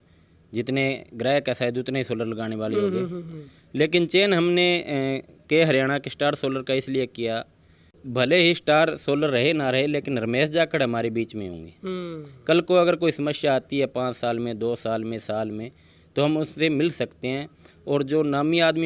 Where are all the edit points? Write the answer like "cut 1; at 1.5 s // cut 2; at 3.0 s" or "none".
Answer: cut 1; at 8.0 s